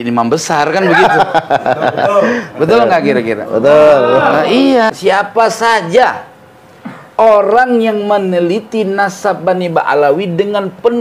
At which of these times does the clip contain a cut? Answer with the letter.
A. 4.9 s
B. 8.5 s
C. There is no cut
A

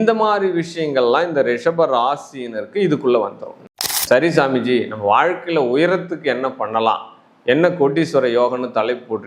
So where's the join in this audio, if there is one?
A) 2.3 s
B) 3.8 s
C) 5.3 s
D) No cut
B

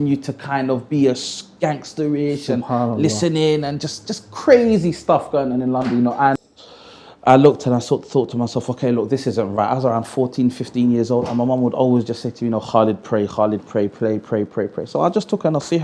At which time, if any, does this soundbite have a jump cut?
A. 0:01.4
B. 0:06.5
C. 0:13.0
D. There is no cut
B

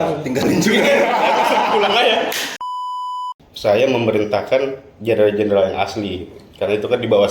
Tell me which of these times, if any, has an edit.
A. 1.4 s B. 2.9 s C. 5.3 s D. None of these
B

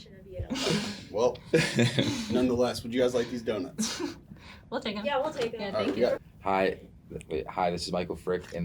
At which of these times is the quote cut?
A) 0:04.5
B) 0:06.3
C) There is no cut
B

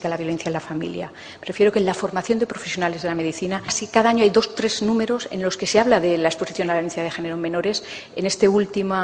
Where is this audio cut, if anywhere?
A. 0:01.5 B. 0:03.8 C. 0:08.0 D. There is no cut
D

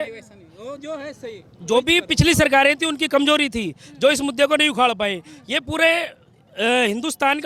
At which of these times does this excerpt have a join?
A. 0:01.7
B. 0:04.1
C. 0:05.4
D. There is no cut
D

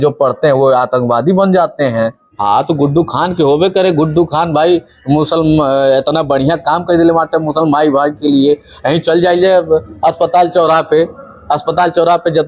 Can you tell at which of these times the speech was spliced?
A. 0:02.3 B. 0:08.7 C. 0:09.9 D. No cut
A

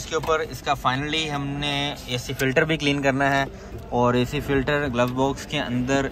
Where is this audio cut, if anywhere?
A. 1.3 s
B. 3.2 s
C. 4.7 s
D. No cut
D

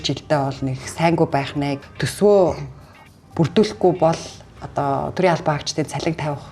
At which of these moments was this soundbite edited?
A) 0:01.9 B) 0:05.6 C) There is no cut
A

